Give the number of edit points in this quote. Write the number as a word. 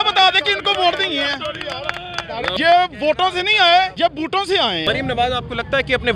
two